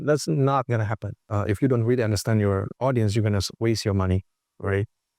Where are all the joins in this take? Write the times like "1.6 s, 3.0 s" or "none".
1.3 s